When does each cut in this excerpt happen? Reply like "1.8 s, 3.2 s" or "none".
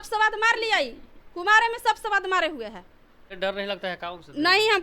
3.3 s

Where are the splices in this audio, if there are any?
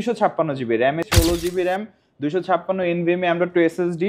1.1 s

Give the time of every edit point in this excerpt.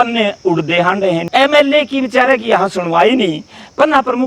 1.2 s

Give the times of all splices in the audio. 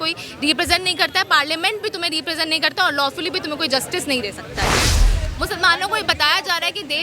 5.0 s

